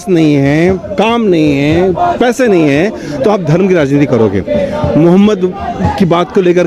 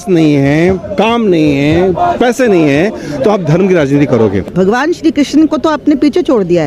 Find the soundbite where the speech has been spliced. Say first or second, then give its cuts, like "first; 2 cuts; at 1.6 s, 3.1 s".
second; 1 cut; at 4.4 s